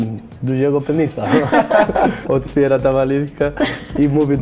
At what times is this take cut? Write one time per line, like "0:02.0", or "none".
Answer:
0:02.2

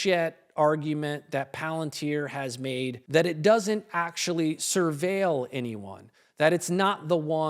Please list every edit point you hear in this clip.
0:03.0

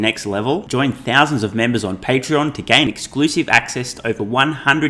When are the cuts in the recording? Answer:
none

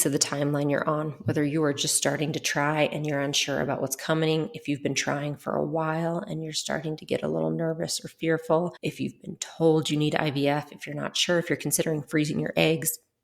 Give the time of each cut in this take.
0:08.8

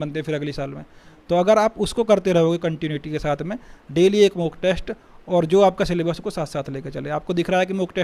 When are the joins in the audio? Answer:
none

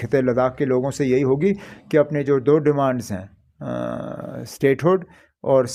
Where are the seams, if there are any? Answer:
none

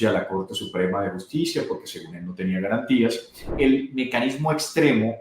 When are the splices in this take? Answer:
0:03.4

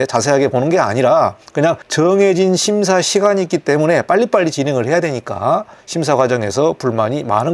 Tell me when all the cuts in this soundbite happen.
0:05.8

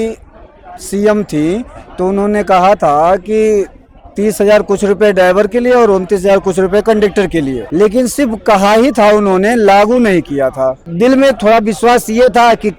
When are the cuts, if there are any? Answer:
0:07.6
0:10.8

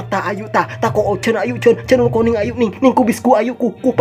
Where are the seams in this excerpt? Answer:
none

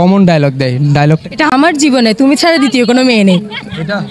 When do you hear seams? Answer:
0:01.5

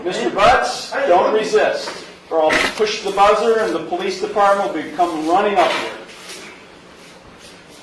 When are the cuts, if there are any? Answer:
none

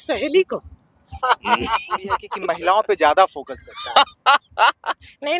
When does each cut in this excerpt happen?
0:02.3

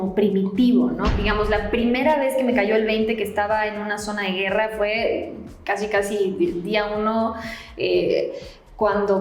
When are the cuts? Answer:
0:01.1

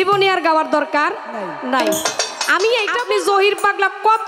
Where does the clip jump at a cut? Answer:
0:03.0

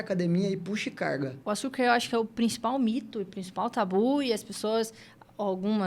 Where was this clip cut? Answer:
0:01.4

